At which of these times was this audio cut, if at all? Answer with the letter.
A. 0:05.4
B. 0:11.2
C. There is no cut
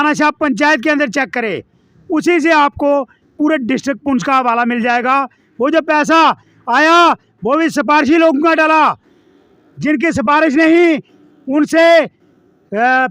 A